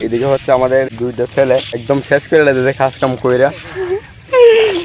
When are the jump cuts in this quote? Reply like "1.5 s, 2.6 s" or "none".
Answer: 0.9 s, 1.8 s